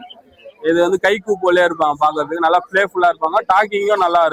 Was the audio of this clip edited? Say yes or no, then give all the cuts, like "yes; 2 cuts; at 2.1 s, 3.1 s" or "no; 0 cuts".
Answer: no; 0 cuts